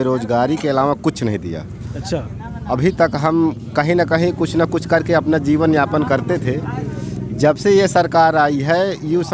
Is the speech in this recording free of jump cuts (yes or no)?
yes